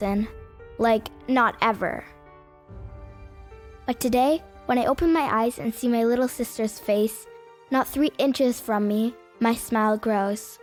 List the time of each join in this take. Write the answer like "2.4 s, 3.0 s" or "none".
none

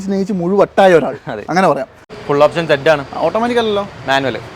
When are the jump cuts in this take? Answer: 2.1 s

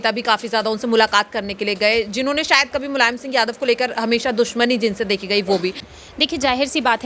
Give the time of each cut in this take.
5.9 s

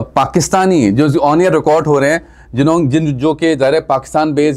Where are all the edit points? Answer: none

